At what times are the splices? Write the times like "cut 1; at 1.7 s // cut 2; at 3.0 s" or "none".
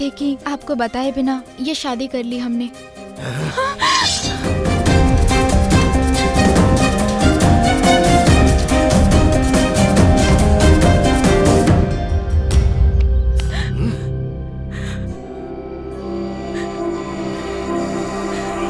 none